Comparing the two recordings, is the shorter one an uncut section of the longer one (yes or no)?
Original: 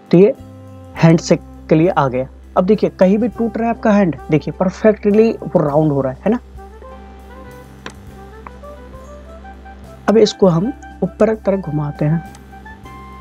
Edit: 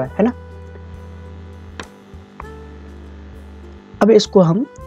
yes